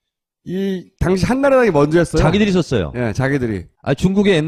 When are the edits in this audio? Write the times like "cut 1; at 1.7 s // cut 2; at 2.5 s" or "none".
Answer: none